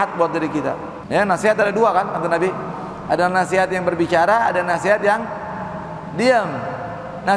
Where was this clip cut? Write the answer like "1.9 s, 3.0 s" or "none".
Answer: 0.9 s